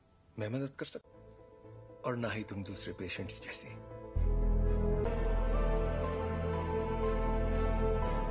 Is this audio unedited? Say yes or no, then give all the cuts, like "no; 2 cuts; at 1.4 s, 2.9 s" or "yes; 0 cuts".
no; 1 cut; at 5.1 s